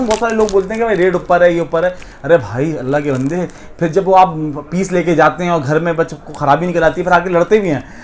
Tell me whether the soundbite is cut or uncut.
uncut